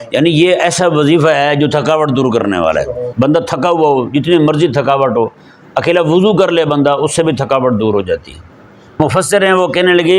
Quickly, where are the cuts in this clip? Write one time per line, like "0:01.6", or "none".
0:03.1
0:09.0